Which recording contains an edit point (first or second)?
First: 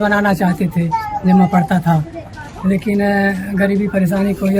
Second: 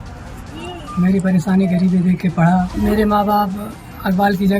second